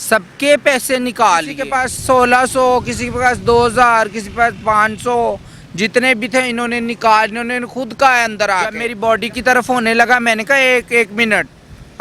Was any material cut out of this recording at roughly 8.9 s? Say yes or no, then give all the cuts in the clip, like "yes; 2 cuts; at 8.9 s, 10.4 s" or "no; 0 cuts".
yes; 2 cuts; at 1.6 s, 8.9 s